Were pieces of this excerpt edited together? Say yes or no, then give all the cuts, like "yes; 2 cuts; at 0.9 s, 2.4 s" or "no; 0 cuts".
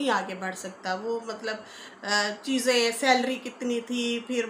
no; 0 cuts